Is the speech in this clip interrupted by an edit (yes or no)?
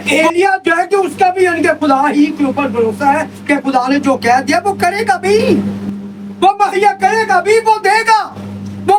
no